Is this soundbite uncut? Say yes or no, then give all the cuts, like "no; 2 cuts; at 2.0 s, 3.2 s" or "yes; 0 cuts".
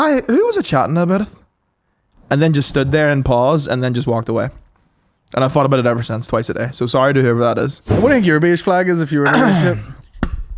no; 1 cut; at 8.0 s